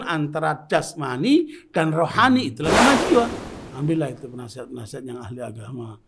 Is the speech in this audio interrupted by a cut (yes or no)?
yes